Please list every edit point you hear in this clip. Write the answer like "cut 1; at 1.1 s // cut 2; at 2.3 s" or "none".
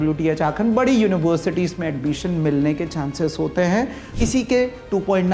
cut 1; at 4.0 s